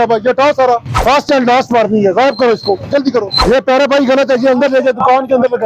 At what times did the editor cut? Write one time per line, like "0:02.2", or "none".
0:00.9
0:03.4